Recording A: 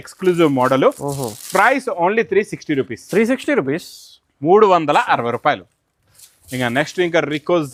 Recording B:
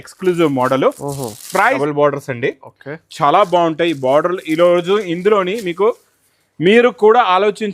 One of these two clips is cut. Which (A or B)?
B